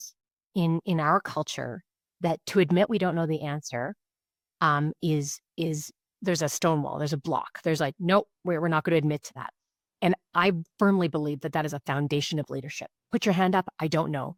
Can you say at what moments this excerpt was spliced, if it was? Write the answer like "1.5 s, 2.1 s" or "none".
none